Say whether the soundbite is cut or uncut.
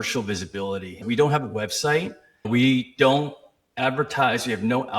cut